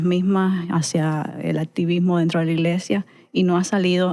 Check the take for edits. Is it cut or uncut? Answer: uncut